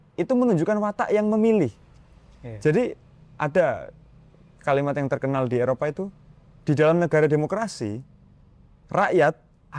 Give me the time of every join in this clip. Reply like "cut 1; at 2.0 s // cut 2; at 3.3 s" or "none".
none